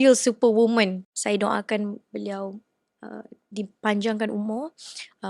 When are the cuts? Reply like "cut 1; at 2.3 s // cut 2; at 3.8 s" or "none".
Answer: cut 1; at 1.1 s